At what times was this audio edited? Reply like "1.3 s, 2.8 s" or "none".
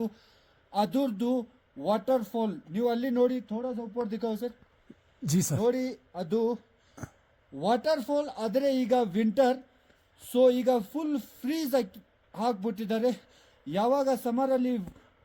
none